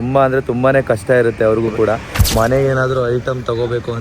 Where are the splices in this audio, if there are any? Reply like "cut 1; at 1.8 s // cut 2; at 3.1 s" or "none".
cut 1; at 2.2 s